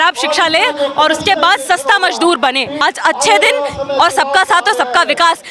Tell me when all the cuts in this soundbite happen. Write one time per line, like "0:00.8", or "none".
0:02.7